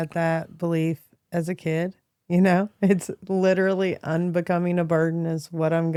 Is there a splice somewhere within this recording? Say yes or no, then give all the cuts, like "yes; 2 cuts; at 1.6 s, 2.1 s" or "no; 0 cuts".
no; 0 cuts